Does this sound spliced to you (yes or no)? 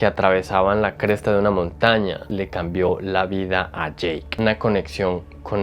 yes